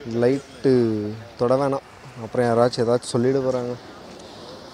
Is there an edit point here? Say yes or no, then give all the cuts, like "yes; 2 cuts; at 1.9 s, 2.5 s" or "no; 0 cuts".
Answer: no; 0 cuts